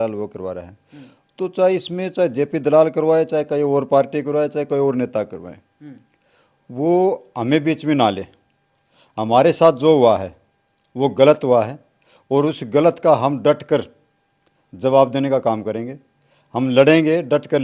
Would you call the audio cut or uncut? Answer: uncut